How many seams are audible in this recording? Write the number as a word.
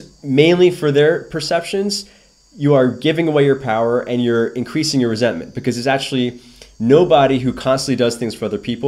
zero